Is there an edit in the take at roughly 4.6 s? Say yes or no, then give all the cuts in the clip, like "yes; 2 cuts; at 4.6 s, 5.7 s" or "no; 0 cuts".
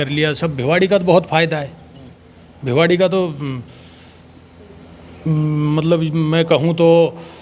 no; 0 cuts